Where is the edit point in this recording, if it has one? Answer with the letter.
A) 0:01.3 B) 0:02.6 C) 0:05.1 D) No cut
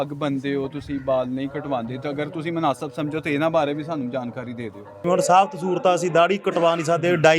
C